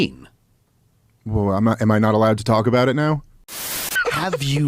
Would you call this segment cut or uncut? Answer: cut